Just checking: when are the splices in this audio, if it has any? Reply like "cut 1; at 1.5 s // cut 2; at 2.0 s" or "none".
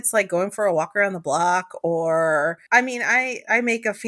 cut 1; at 2.6 s

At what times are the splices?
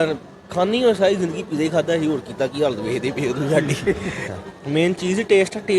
cut 1; at 4.3 s

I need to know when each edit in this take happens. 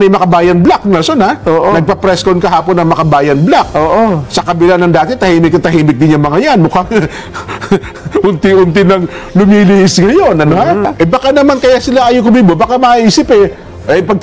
cut 1; at 10.9 s

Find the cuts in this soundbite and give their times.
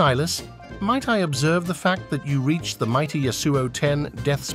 none

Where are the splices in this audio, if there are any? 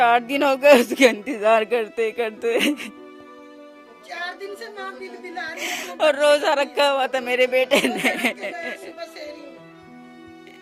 none

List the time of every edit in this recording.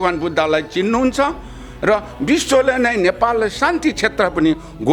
none

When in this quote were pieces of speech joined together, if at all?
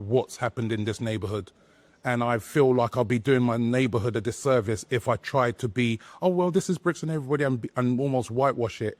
none

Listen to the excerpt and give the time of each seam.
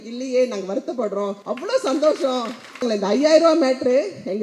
cut 1; at 1.4 s // cut 2; at 2.8 s

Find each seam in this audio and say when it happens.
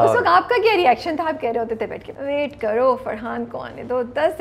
cut 1; at 2.1 s

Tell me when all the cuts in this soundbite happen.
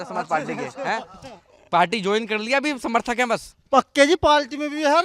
none

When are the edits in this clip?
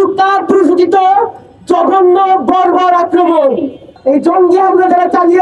cut 1; at 3.9 s

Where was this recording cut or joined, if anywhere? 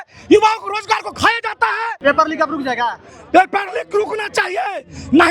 cut 1; at 1.9 s

